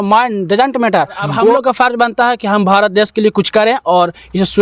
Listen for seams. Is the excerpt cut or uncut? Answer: cut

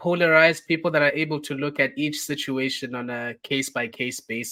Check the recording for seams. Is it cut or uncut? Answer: uncut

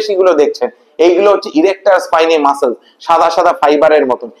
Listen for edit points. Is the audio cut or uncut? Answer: uncut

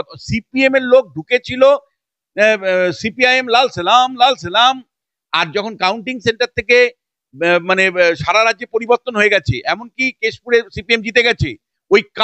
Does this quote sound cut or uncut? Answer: uncut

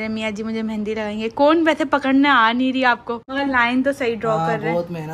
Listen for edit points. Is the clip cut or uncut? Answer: cut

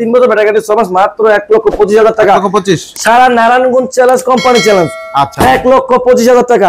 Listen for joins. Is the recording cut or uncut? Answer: uncut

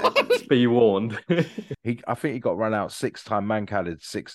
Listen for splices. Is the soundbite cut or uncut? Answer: cut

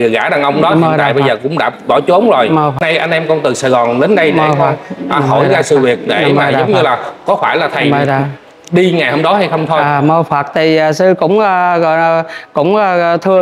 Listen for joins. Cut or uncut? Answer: cut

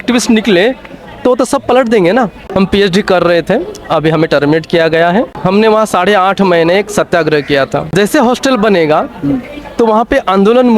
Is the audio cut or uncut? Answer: cut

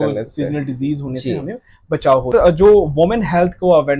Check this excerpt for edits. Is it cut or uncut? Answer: cut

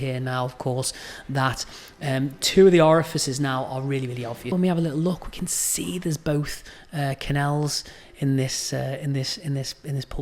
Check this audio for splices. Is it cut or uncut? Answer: cut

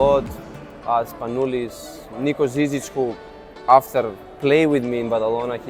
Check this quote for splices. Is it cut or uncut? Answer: uncut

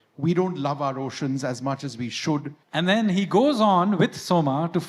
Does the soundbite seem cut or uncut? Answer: cut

